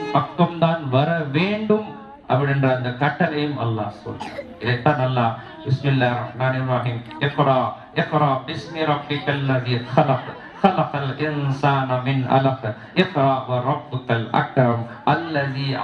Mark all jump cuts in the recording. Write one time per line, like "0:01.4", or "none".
none